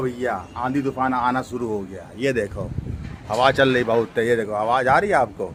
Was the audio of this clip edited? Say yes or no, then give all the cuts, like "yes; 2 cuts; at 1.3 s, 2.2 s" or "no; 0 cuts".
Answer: no; 0 cuts